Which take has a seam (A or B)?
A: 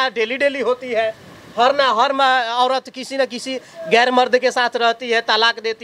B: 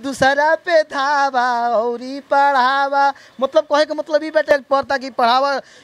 B